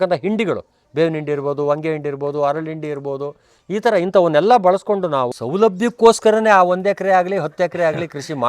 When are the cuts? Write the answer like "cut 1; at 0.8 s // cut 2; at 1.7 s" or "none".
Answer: cut 1; at 5.3 s